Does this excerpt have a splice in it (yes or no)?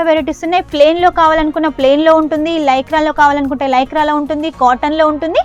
no